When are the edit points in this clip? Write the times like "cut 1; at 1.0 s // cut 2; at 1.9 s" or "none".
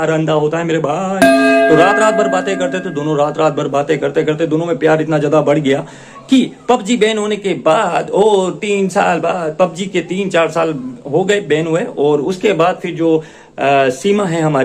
none